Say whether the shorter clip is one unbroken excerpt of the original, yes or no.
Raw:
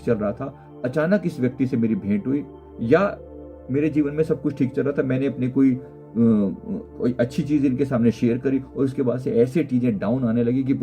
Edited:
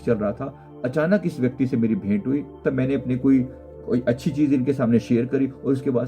no